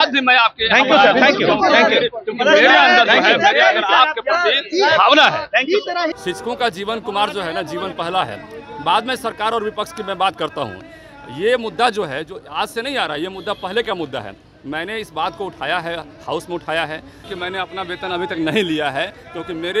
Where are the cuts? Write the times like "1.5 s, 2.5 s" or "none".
6.1 s, 17.3 s